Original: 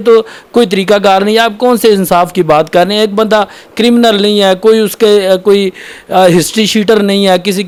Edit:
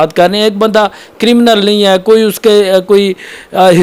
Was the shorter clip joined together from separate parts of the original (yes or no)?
no